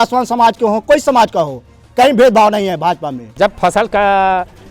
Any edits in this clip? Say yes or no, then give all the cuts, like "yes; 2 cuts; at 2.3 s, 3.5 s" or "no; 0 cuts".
yes; 1 cut; at 3.3 s